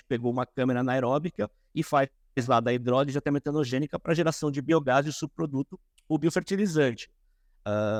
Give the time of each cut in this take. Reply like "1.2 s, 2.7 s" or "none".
none